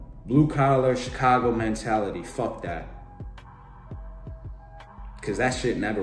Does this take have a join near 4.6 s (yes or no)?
yes